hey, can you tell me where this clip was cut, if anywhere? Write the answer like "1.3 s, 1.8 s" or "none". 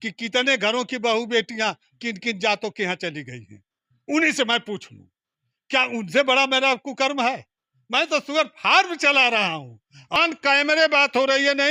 10.2 s